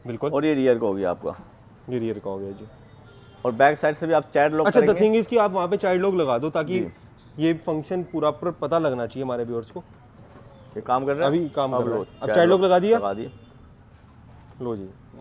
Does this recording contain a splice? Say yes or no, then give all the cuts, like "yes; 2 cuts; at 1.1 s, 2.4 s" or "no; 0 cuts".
no; 0 cuts